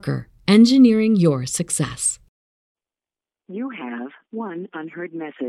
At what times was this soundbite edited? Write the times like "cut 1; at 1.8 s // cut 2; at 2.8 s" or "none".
cut 1; at 2.7 s